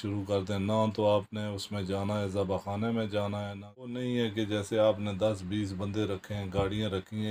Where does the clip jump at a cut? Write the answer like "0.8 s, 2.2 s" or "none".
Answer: 3.9 s

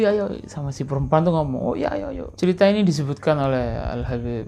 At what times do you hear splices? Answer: 2.2 s

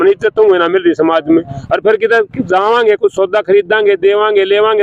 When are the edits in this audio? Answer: none

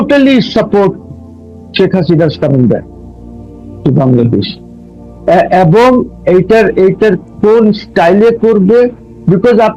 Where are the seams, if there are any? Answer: none

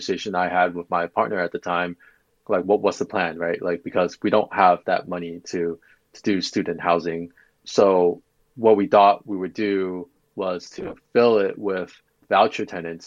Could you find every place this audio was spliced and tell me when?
12.2 s

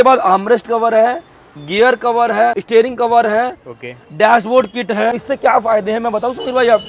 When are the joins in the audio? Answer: 2.6 s, 5.2 s

